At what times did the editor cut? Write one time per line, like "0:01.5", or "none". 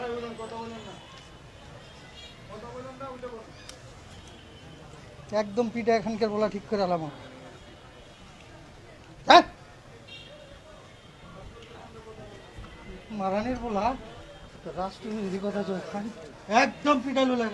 none

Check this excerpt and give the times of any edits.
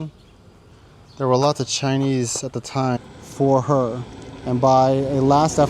0:03.0

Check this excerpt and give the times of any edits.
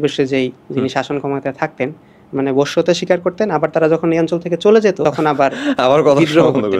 0:02.0
0:05.0

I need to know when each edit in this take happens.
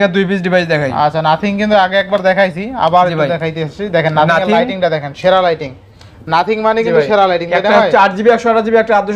none

